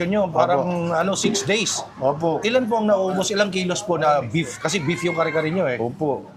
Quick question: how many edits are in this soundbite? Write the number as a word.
zero